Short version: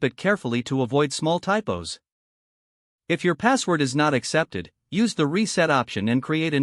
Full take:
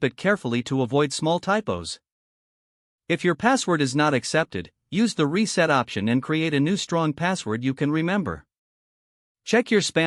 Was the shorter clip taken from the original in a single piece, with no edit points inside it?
yes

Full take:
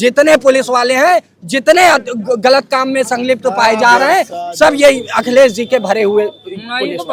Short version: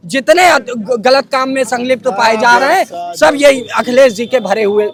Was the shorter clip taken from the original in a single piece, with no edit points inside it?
yes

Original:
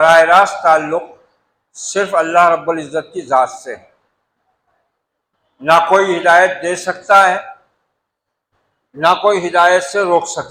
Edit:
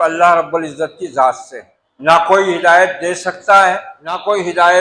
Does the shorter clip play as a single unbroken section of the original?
no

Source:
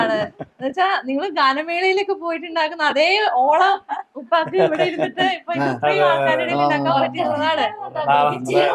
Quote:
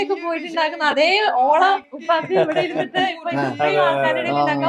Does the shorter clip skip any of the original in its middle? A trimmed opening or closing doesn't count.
yes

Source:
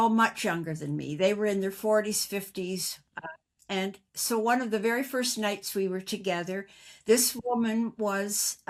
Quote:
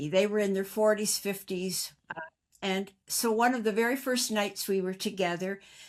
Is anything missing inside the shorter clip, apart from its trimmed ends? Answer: no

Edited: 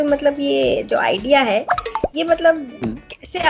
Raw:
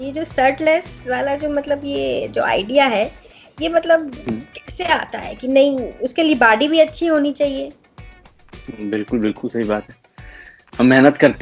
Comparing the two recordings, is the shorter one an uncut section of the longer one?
yes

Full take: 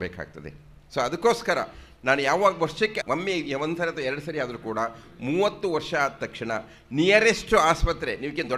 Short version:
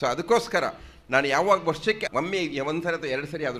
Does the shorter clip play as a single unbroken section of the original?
yes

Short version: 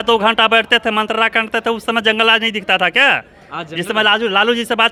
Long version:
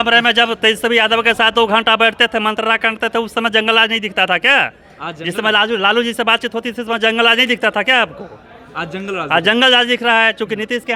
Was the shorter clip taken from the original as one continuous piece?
yes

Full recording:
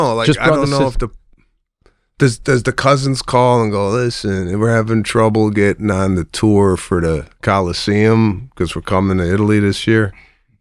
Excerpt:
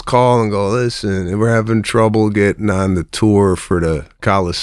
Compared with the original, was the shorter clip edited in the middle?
no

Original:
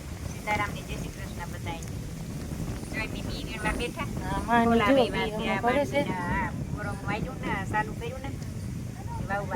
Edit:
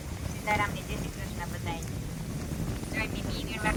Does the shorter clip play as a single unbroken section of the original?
yes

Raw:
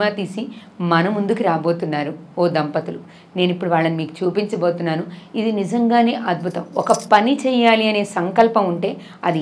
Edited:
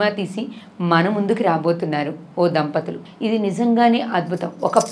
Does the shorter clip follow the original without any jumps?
no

